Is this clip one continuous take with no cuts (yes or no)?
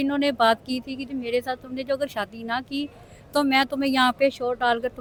yes